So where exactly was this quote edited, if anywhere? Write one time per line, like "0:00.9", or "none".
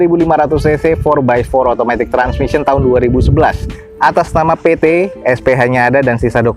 none

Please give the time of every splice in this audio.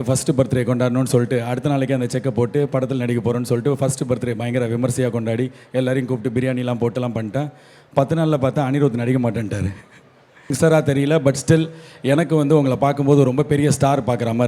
0:10.5

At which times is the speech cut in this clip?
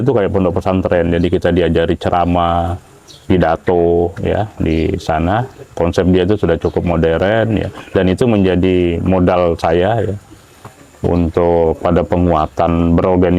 none

